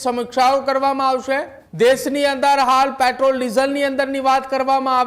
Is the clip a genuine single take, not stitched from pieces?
no; 1 cut; at 1.6 s

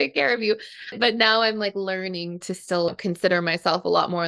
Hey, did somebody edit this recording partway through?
yes; 2 cuts; at 0.9 s, 2.9 s

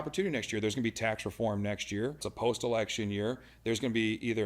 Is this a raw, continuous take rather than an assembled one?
no; 1 cut; at 2.3 s

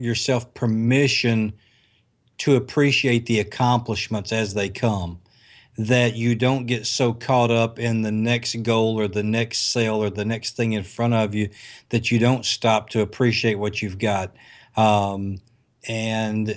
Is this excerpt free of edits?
yes; 0 cuts

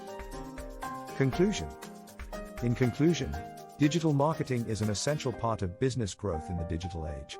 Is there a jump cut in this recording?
no; 0 cuts

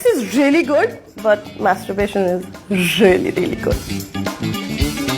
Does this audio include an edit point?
yes; 2 cuts; at 1.1 s, 3.9 s

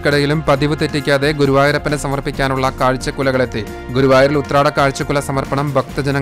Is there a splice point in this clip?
no; 0 cuts

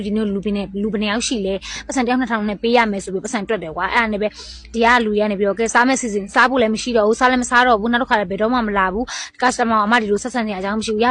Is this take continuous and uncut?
yes; 0 cuts

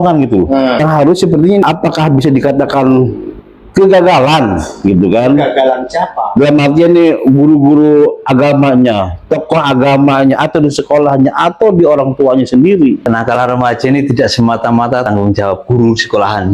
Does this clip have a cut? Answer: yes; 4 cuts; at 0.8 s, 1.6 s, 13.0 s, 15.1 s

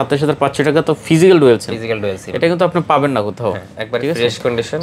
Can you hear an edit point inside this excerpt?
no; 0 cuts

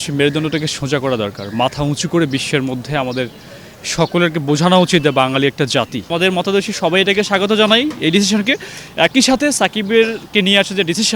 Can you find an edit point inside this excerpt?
yes; 1 cut; at 6.1 s

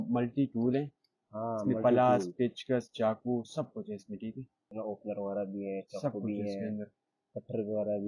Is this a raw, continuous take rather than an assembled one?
no; 1 cut; at 4.6 s

